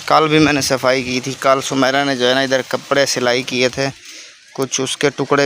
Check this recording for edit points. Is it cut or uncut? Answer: uncut